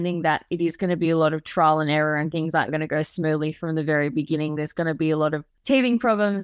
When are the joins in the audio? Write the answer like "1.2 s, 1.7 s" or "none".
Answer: 5.5 s